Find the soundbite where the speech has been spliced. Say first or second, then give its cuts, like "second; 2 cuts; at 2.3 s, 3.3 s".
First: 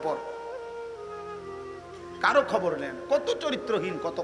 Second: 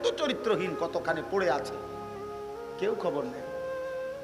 first; 2 cuts; at 0.7 s, 2.2 s